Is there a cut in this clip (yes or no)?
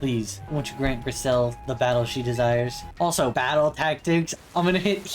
yes